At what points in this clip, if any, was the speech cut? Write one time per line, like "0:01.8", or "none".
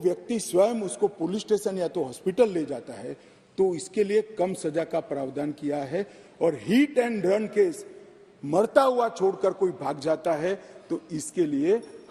none